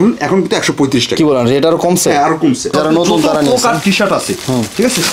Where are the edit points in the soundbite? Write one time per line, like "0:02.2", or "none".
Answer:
0:02.7